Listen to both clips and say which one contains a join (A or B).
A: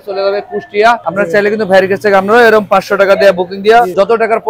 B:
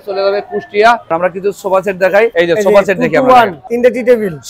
B